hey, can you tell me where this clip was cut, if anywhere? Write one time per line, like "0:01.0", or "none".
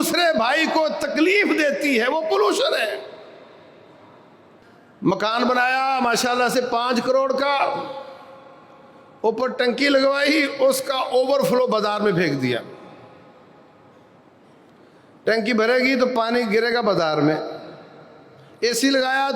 0:04.6